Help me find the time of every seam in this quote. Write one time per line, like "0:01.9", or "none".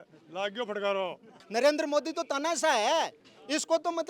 0:01.4